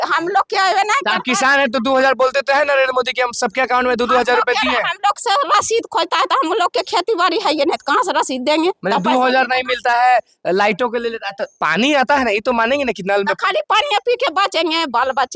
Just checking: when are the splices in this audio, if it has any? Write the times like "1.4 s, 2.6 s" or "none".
none